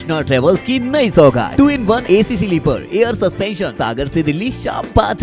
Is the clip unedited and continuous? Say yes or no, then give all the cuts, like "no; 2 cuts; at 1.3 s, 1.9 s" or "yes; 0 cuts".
no; 2 cuts; at 1.6 s, 3.7 s